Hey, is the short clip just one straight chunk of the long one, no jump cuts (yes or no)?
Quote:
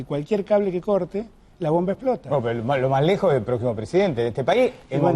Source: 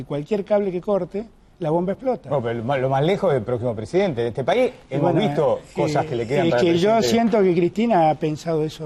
yes